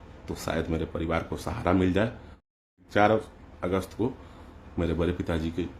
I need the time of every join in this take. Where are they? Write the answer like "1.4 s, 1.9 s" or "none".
2.8 s